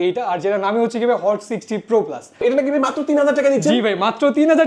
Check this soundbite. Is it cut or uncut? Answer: cut